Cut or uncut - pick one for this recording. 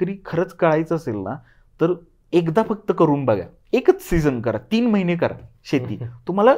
uncut